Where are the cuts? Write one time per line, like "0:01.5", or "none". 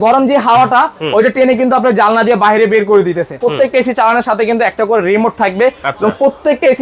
0:03.4

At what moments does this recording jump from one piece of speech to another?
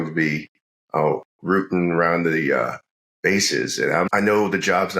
0:04.1

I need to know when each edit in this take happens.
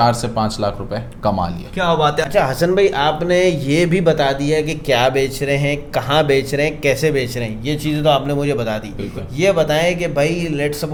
none

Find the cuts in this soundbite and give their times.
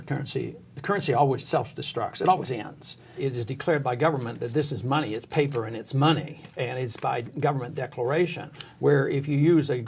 0:01.4
0:03.1

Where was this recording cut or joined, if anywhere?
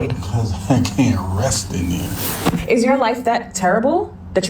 0:02.6

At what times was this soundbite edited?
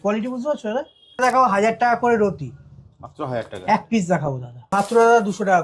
0:01.2
0:04.5

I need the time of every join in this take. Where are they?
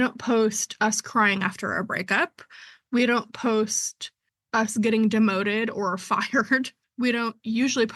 0:06.8

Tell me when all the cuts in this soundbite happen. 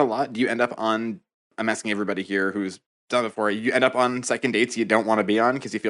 none

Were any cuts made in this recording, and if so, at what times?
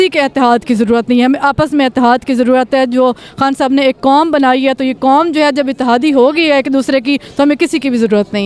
none

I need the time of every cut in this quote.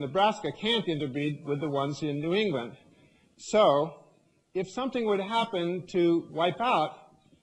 0:04.0

